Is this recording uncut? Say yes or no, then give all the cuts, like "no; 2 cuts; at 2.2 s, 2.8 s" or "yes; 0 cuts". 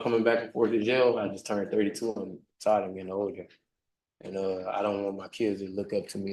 yes; 0 cuts